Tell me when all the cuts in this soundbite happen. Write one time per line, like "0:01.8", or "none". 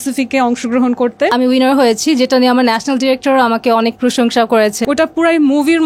0:01.3
0:04.8

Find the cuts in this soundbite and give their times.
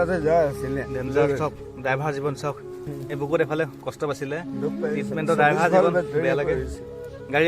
0:02.8

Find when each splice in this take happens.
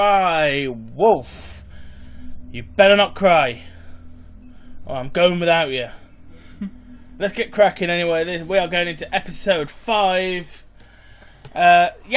0:05.2

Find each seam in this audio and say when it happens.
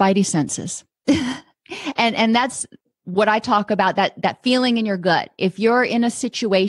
none

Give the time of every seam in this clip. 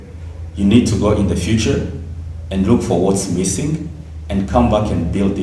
none

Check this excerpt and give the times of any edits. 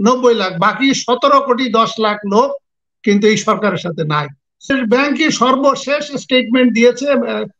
0:04.7

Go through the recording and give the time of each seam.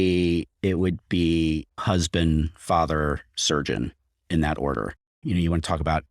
0:01.8
0:05.1

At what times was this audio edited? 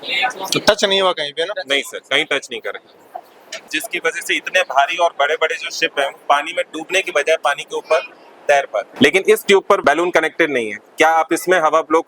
0:03.7
0:08.9
0:09.8

